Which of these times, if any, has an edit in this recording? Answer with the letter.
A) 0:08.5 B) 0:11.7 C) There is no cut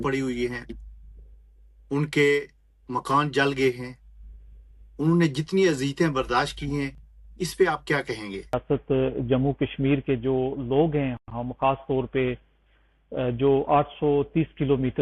A